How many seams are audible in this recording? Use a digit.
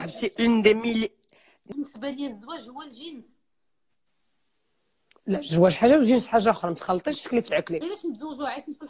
2